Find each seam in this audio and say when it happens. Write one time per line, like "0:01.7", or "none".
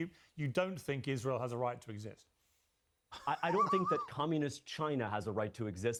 none